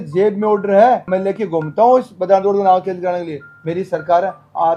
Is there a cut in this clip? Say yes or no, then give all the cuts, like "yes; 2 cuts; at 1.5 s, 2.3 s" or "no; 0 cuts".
no; 0 cuts